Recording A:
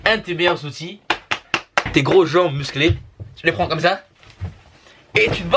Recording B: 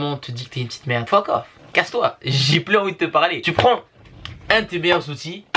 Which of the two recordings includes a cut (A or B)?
B